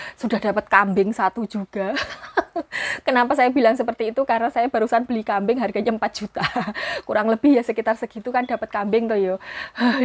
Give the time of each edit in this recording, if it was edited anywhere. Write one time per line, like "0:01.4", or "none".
none